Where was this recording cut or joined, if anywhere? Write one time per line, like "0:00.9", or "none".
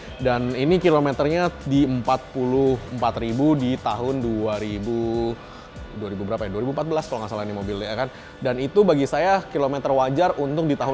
none